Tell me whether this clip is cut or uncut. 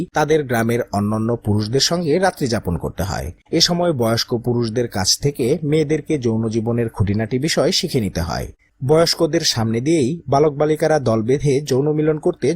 cut